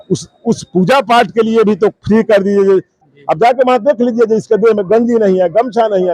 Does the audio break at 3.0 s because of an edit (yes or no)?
yes